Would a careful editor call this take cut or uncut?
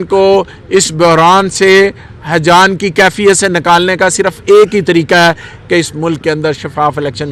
uncut